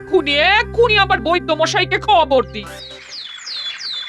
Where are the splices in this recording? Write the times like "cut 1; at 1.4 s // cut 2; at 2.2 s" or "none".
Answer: cut 1; at 2.9 s